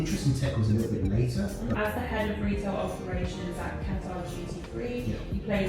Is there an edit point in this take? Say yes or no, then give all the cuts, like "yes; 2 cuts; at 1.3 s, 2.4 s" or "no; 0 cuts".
yes; 1 cut; at 1.8 s